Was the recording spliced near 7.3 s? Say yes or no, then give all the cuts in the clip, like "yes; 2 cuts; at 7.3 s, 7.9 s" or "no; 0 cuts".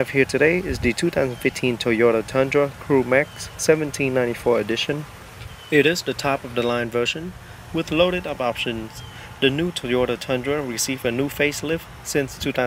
yes; 1 cut; at 7.3 s